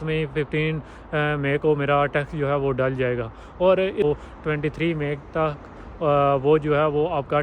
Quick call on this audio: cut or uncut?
cut